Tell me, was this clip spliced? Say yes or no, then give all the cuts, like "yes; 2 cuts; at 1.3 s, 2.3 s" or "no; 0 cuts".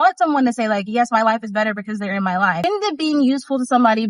yes; 1 cut; at 2.6 s